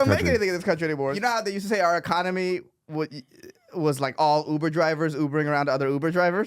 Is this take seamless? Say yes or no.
no